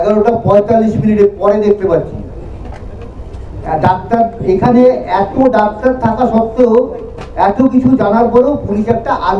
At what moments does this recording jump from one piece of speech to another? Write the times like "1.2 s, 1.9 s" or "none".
none